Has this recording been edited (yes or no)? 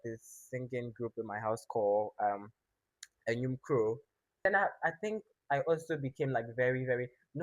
yes